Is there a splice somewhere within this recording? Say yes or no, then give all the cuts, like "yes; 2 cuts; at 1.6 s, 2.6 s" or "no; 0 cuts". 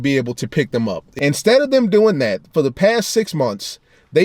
yes; 1 cut; at 1.0 s